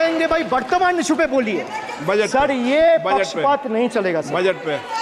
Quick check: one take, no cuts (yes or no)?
yes